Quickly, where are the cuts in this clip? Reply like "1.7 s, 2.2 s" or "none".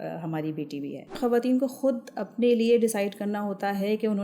1.2 s